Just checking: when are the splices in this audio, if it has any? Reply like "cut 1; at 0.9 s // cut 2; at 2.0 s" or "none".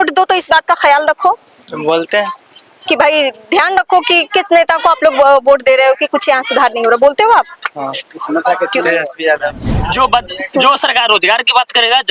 cut 1; at 9.7 s